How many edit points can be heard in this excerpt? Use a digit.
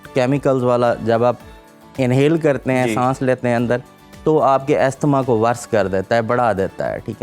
0